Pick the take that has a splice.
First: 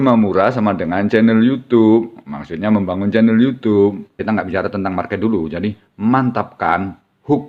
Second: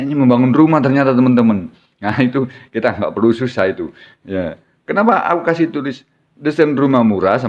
first; 1 cut; at 4.1 s

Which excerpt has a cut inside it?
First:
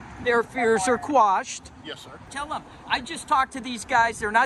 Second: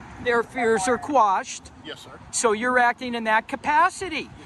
first; 1 cut; at 2.3 s

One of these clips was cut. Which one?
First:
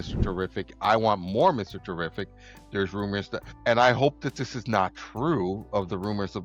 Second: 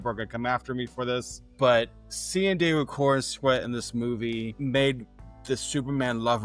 second; 1 cut; at 5.3 s

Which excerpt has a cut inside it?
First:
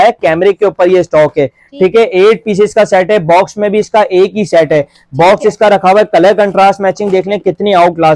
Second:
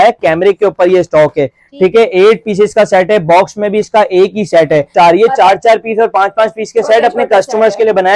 second; 1 cut; at 4.9 s

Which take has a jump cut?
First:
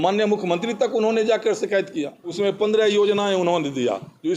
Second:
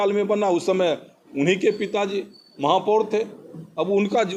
first; 1 cut; at 2.2 s

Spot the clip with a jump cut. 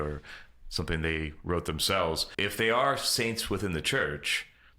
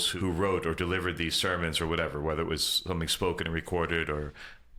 first; 1 cut; at 2.3 s

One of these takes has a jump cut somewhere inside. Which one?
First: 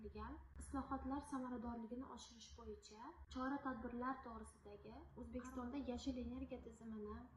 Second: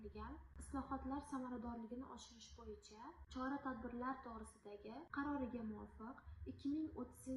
first; 1 cut; at 5.0 s

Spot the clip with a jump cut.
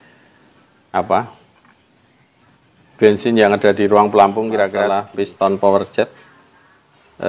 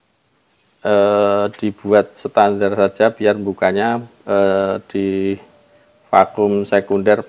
first; 1 cut; at 5.0 s

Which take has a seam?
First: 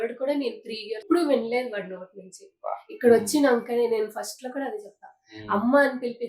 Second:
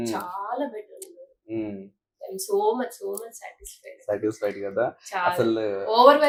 first; 1 cut; at 1.0 s

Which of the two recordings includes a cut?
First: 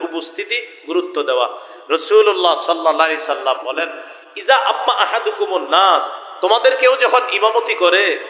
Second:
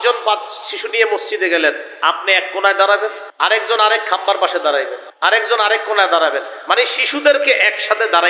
second; 2 cuts; at 3.2 s, 5.0 s

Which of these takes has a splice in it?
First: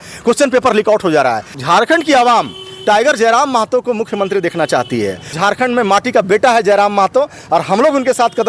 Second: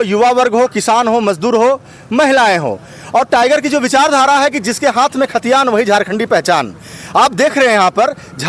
first; 2 cuts; at 1.6 s, 5.4 s

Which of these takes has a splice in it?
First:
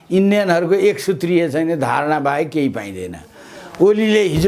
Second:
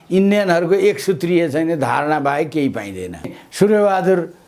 second; 1 cut; at 3.4 s

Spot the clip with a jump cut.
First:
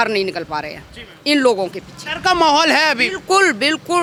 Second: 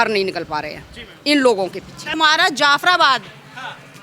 second; 1 cut; at 2.0 s

